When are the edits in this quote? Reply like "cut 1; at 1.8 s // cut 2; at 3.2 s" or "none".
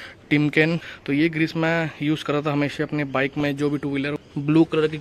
cut 1; at 0.9 s // cut 2; at 4.2 s